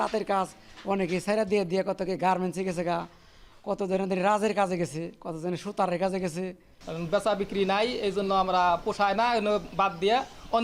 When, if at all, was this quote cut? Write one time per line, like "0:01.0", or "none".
none